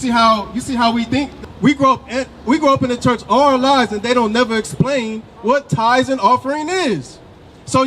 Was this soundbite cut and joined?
yes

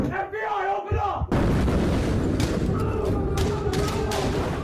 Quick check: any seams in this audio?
no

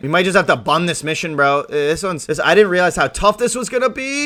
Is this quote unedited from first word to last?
yes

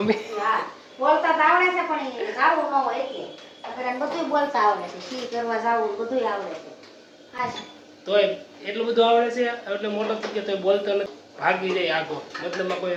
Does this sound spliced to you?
no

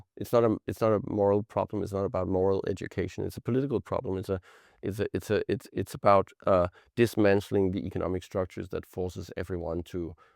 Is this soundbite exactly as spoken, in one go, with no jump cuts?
yes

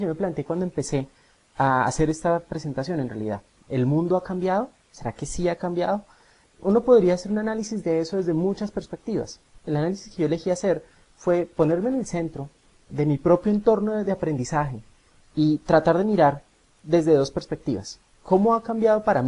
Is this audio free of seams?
no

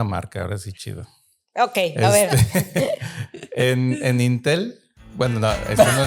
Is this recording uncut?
yes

